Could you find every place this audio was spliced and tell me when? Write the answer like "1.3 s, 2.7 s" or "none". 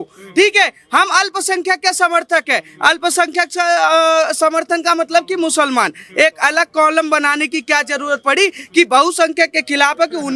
none